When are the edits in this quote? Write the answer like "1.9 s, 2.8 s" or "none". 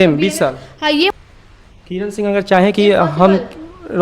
1.2 s